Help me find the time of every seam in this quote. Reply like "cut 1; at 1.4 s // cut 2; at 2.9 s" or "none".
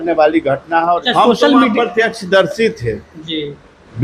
cut 1; at 1.0 s